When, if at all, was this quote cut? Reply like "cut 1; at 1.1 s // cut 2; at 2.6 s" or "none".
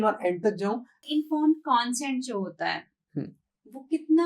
cut 1; at 1.1 s